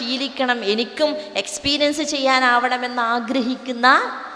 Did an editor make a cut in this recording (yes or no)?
no